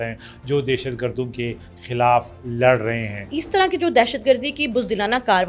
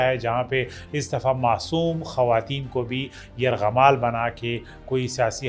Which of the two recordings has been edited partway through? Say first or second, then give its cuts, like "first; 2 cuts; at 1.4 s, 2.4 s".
first; 1 cut; at 3.3 s